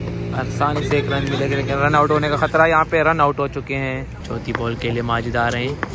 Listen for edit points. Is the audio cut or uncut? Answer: cut